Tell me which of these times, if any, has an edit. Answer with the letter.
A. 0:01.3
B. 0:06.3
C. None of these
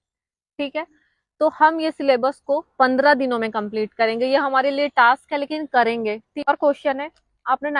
B